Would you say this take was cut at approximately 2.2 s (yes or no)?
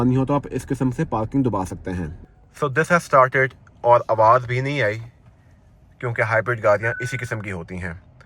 yes